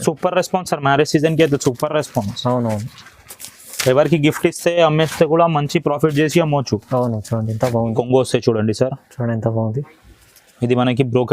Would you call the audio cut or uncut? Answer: cut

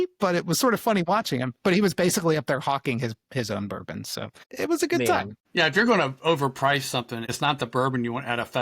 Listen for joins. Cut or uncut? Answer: cut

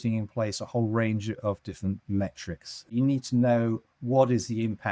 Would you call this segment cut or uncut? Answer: cut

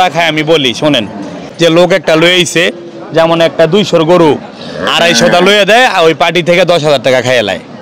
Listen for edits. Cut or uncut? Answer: cut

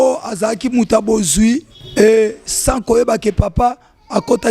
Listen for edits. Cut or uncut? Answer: cut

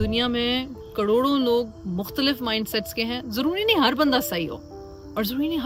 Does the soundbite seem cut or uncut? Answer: uncut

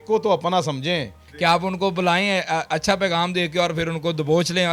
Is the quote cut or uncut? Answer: cut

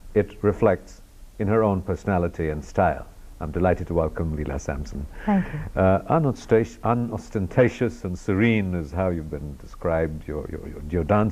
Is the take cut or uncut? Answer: cut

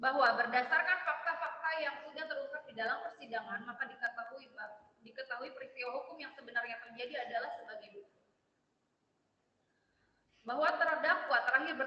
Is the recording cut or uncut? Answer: uncut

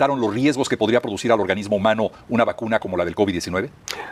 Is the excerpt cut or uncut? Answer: uncut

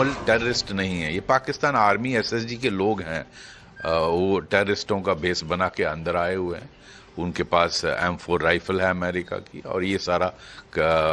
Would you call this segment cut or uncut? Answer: uncut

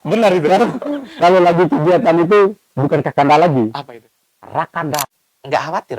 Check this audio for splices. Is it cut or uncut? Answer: cut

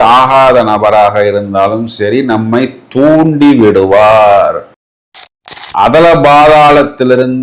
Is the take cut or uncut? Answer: cut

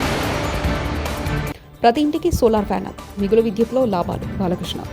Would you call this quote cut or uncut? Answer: cut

